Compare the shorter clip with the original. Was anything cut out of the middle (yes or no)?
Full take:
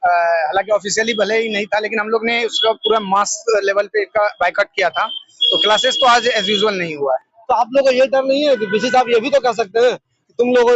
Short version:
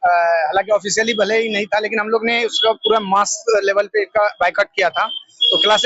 no